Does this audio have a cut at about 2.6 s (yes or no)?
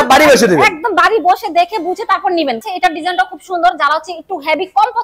yes